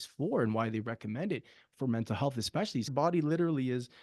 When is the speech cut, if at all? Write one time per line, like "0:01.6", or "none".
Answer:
0:02.9